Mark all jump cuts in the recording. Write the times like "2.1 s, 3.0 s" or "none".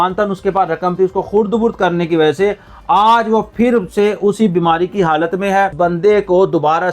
5.7 s